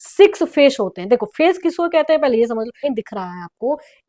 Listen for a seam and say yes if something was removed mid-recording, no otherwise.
yes